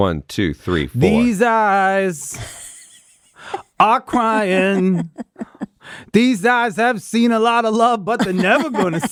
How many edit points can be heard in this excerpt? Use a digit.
0